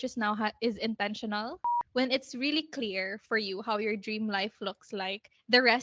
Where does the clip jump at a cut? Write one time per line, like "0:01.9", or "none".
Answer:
0:01.6